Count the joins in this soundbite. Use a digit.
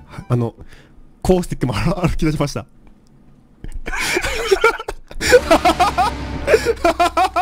0